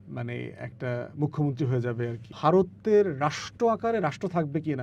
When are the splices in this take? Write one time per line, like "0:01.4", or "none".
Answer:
0:02.3